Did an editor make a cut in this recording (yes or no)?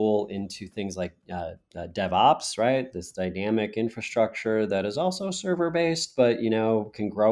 no